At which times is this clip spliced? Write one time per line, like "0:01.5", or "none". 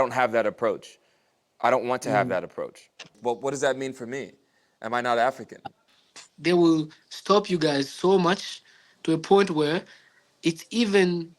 0:03.1
0:05.8